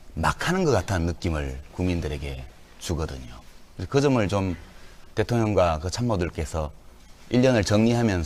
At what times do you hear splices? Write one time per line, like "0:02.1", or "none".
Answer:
none